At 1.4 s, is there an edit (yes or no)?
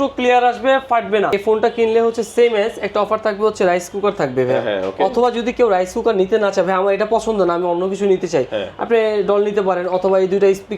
yes